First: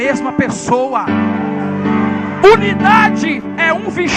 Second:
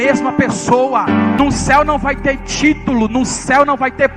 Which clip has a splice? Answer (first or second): second